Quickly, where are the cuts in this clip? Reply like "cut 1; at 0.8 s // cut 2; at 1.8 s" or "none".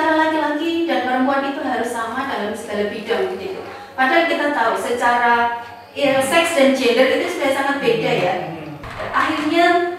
cut 1; at 8.8 s